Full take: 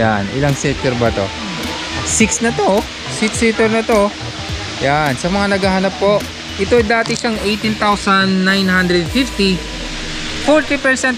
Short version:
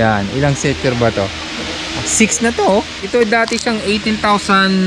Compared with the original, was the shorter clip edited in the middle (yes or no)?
yes